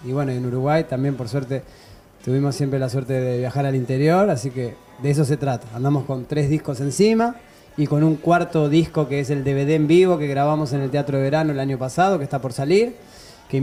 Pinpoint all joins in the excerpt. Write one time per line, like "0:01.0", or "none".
none